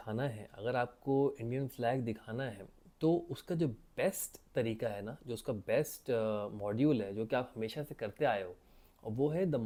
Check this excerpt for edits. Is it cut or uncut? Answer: uncut